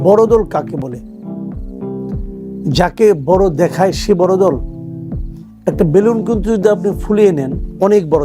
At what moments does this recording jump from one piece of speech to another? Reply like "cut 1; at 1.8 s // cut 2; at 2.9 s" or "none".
cut 1; at 1.2 s // cut 2; at 2.6 s

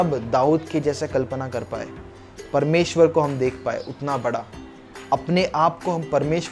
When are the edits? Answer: none

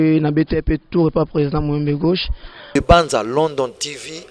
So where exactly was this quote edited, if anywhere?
cut 1; at 2.6 s

